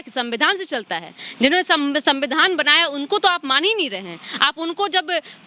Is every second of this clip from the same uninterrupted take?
yes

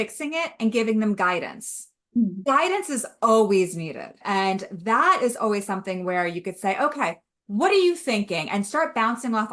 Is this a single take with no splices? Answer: no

